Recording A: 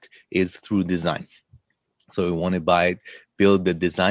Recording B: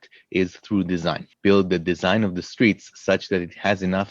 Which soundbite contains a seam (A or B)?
B